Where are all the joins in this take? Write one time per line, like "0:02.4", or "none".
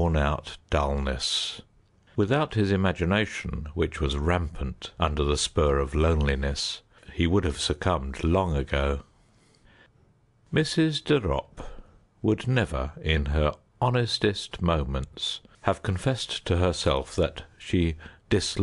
none